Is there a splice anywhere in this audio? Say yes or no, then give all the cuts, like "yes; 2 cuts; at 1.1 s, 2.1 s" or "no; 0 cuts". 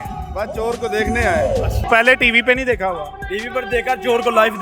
yes; 1 cut; at 1.9 s